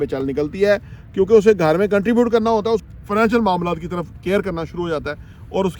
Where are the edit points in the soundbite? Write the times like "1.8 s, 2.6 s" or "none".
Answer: 2.8 s

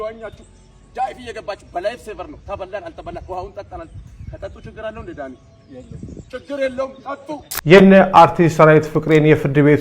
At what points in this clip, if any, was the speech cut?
7.5 s

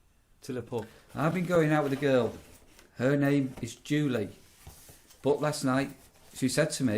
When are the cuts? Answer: 1.0 s

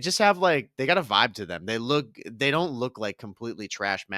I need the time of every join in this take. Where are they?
none

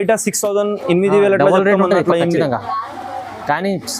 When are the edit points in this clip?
none

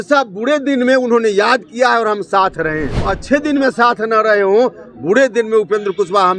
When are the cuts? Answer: 3.0 s

